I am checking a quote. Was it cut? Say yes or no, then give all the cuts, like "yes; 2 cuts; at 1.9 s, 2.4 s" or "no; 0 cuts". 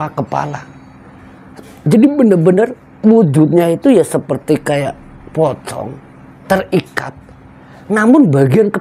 no; 0 cuts